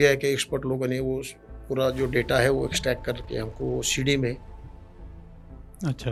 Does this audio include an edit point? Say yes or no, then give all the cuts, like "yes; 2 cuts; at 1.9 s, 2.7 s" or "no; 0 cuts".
no; 0 cuts